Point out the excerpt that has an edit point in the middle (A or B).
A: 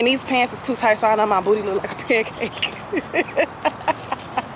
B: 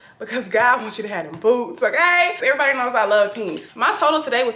B